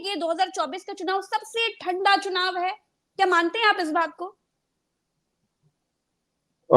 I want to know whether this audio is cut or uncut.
uncut